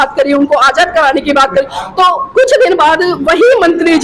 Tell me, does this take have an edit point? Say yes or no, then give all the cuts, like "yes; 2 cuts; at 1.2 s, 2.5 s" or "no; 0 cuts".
no; 0 cuts